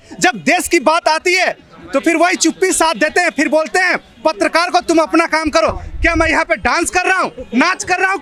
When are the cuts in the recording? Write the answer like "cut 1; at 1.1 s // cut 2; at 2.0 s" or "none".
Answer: none